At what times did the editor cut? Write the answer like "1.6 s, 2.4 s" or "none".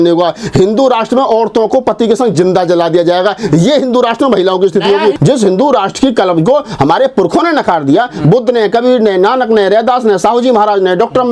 5.2 s